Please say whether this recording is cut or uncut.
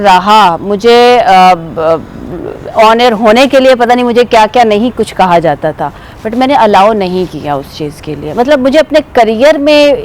uncut